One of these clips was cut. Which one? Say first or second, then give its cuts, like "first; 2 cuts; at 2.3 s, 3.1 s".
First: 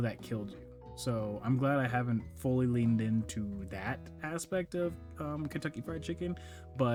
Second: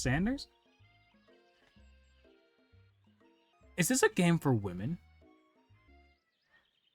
second; 2 cuts; at 3.5 s, 5.9 s